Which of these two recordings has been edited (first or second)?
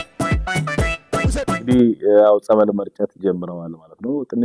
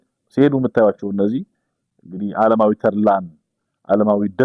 first